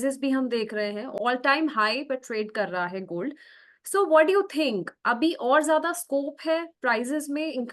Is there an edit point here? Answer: no; 0 cuts

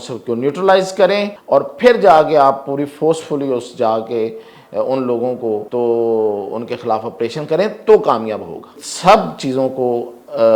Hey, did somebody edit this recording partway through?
yes; 3 cuts; at 1.3 s, 5.7 s, 8.8 s

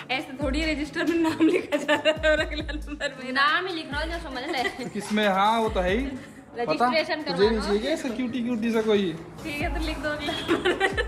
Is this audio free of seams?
yes; 0 cuts

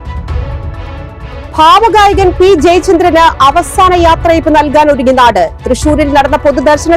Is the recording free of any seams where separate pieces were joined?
no; 1 cut; at 1.4 s

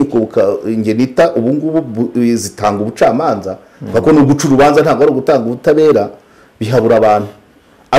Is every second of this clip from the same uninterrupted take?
yes; 0 cuts

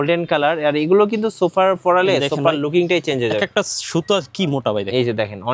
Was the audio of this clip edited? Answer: no; 0 cuts

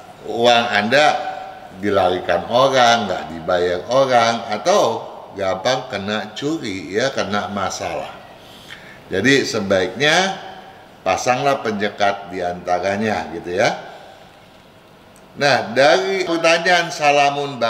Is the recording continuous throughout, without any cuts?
yes; 0 cuts

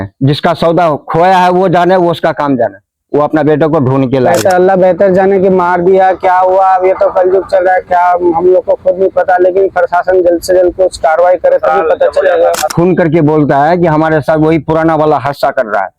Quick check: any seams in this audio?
yes; 2 cuts; at 4.4 s, 12.7 s

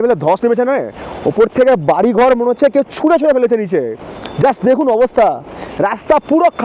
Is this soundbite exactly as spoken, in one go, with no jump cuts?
yes; 0 cuts

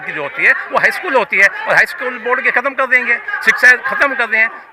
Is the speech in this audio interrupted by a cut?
no; 0 cuts

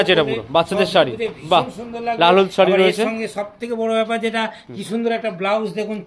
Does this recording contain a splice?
no; 0 cuts

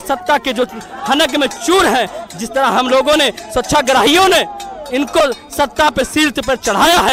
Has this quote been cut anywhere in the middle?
no; 0 cuts

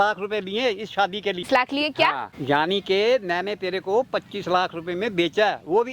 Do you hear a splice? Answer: yes; 2 cuts; at 1.5 s, 2.3 s

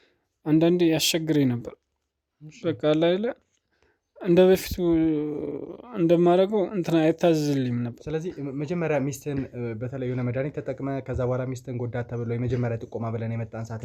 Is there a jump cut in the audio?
no; 0 cuts

